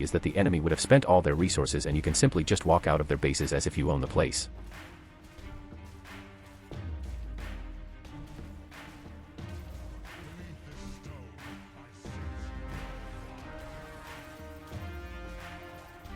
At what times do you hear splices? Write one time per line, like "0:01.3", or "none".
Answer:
0:04.7